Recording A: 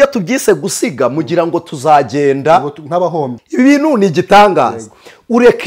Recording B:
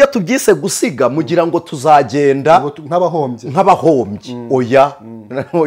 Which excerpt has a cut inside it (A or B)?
A